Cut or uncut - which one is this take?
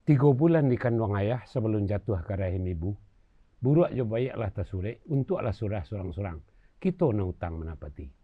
uncut